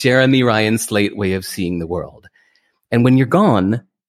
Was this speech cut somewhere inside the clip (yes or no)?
no